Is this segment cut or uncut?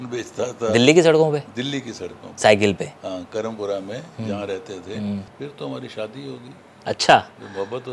cut